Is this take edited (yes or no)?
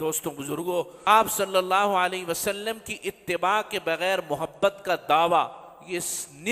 yes